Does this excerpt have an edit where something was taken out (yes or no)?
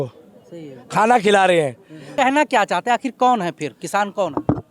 yes